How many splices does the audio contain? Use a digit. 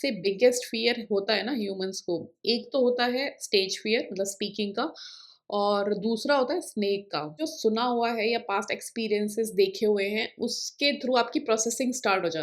1